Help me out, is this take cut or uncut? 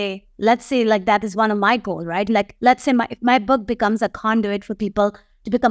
uncut